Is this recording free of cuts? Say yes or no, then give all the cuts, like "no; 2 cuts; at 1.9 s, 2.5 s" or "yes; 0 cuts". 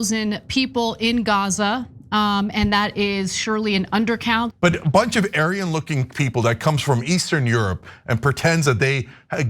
no; 1 cut; at 4.5 s